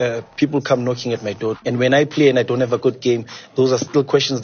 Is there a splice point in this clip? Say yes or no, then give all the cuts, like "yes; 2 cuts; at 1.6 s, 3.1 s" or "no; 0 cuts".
yes; 1 cut; at 1.6 s